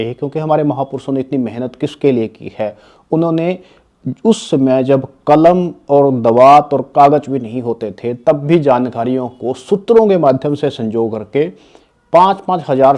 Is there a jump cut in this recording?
no; 0 cuts

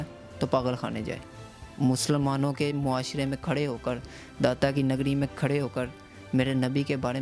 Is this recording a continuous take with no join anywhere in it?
yes; 0 cuts

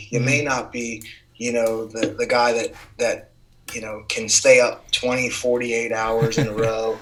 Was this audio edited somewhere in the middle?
no; 0 cuts

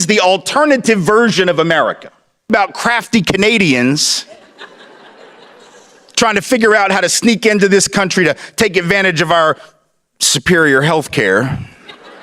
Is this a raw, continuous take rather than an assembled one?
no; 1 cut; at 2.5 s

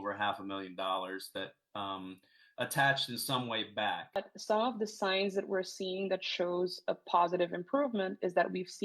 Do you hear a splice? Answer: yes; 1 cut; at 4.2 s

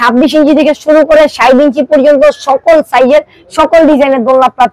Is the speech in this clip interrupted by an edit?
no; 0 cuts

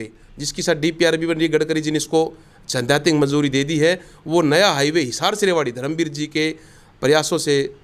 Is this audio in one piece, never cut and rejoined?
yes; 0 cuts

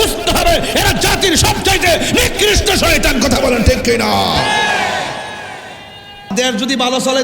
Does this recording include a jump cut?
yes; 1 cut; at 6.3 s

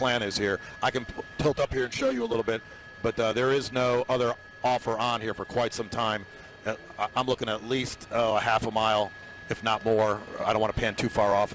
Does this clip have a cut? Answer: yes; 1 cut; at 3.3 s

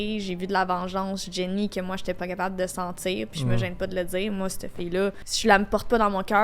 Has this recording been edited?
yes; 1 cut; at 5.3 s

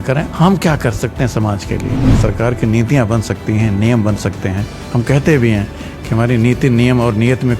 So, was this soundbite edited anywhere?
yes; 1 cut; at 2.1 s

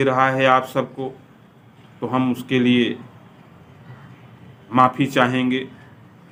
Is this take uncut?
yes; 0 cuts

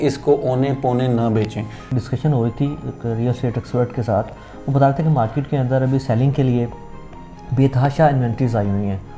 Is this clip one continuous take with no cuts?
no; 1 cut; at 1.9 s

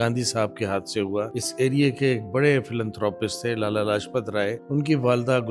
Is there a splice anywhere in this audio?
yes; 2 cuts; at 1.4 s, 4.6 s

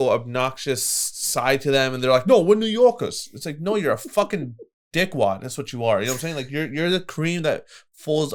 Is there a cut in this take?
no; 0 cuts

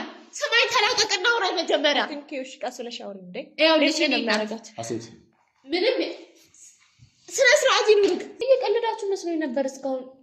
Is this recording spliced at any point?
yes; 1 cut; at 8.3 s

